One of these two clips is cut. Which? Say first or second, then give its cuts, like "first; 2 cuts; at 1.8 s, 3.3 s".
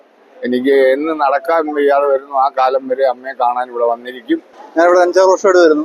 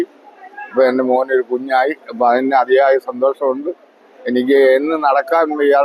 first; 1 cut; at 4.6 s